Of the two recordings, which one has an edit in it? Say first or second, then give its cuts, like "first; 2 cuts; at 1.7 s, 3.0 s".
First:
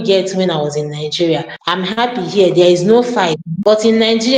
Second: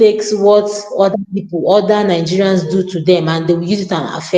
first; 2 cuts; at 1.5 s, 3.5 s